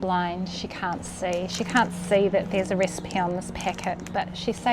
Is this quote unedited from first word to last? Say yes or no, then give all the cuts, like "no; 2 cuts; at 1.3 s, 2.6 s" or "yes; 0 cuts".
yes; 0 cuts